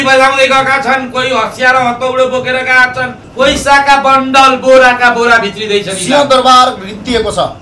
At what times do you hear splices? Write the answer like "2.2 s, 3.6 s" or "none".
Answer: 3.2 s